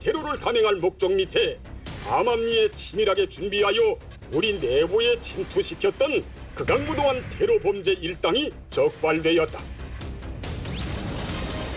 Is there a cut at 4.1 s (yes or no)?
no